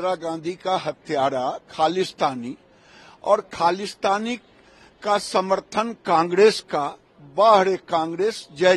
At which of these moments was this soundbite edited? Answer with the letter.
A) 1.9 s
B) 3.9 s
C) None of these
C